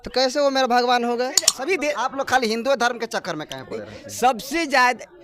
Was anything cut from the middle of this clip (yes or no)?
yes